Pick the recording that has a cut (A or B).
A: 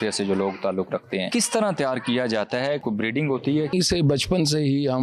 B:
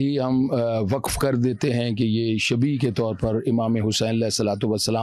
A